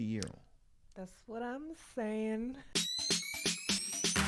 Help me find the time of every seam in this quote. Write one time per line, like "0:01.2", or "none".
0:02.7

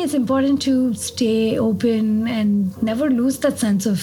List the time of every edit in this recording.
none

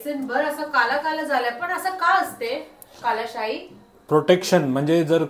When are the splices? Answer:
none

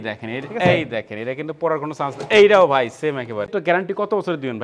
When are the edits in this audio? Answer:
0:03.5

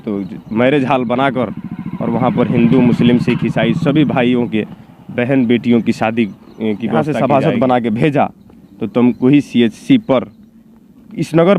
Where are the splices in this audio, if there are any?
0:07.0

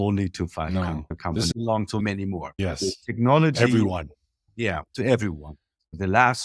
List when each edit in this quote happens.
0:01.5
0:02.5

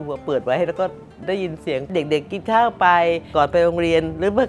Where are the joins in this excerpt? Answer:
0:03.3

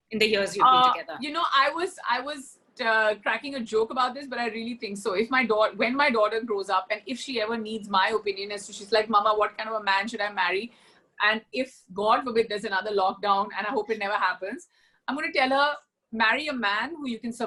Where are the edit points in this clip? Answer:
none

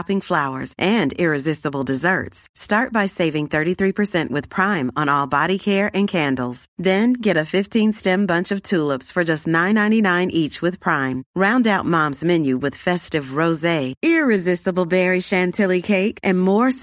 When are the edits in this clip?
none

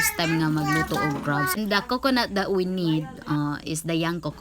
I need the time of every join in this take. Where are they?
0:01.6

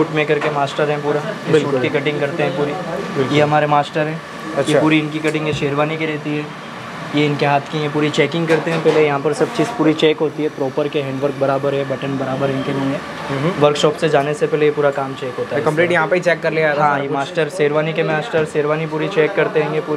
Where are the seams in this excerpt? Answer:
none

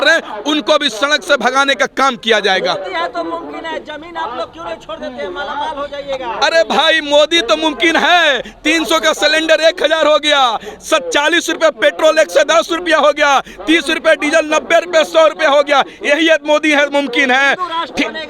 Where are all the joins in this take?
none

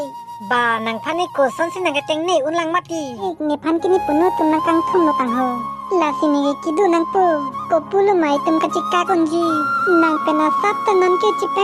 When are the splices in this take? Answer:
0:03.2

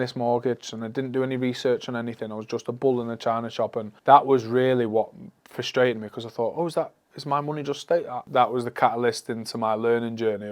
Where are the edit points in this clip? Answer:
0:03.9
0:08.2

